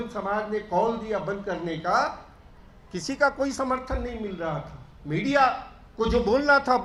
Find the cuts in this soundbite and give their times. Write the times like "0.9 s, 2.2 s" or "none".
none

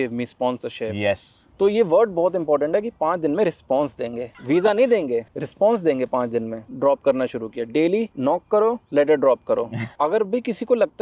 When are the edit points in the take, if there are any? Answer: 1.4 s, 6.6 s, 9.8 s

